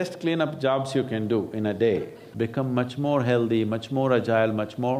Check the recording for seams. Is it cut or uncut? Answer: cut